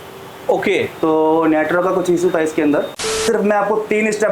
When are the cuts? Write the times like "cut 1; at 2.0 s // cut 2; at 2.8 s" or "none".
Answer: cut 1; at 3.2 s